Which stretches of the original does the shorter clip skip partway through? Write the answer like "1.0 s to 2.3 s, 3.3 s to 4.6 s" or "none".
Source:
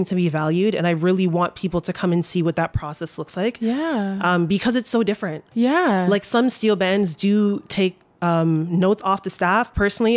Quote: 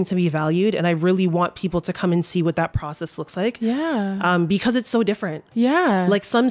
none

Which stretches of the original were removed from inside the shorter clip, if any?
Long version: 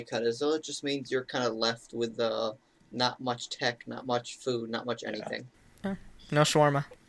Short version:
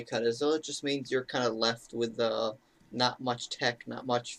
none

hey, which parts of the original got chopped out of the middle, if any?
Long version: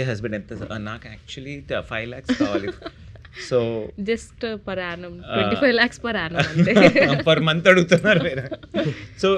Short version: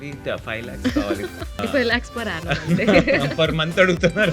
3.0 s to 5.5 s

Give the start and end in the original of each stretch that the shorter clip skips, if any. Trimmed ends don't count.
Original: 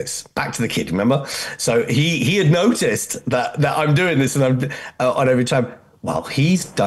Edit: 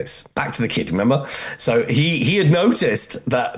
none

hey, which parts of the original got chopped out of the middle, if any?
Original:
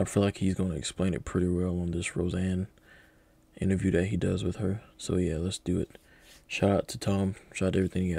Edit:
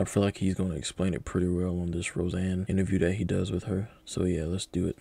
2.6 s to 3.6 s

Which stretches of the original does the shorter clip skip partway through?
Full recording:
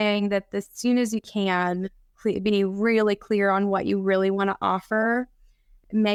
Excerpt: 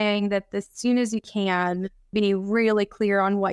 2.1 s to 2.4 s

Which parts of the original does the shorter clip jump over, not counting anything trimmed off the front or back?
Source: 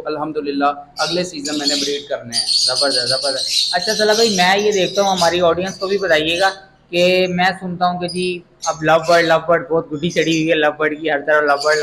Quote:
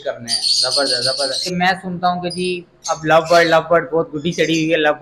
3.6 s to 7.3 s

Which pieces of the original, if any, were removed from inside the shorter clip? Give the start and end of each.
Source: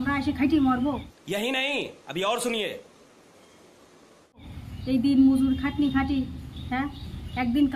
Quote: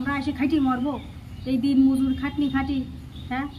1.1 s to 4.5 s

